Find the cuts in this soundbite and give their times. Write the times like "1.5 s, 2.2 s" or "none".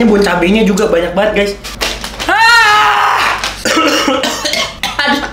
none